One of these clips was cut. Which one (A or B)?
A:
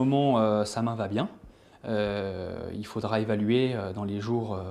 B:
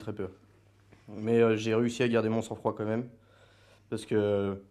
B